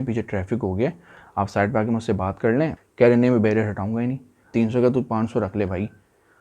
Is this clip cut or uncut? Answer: cut